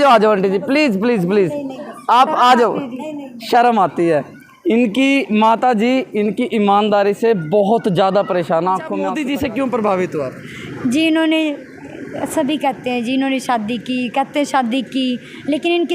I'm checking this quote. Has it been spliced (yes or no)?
yes